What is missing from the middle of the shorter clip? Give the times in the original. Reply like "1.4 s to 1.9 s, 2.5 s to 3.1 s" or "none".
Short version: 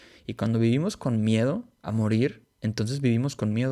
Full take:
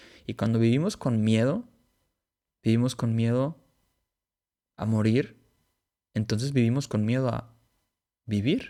1.8 s to 4.7 s, 5.4 s to 6.0 s